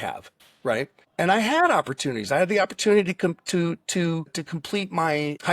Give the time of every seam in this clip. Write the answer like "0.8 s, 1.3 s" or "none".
1.0 s